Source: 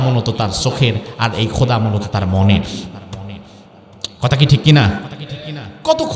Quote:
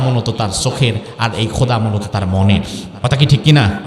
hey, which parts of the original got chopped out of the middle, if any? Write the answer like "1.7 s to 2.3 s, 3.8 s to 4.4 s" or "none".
2.8 s to 4.0 s